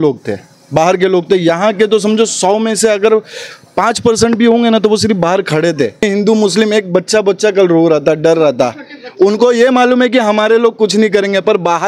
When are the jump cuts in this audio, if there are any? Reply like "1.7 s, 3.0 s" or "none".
6.0 s